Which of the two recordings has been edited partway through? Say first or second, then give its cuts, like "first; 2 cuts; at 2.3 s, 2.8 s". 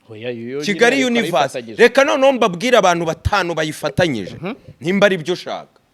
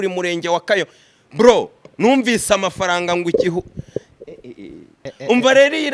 second; 1 cut; at 5.0 s